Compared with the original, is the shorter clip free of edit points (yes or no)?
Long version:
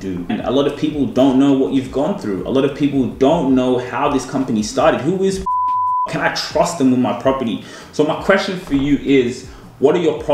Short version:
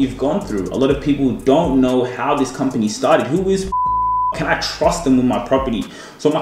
yes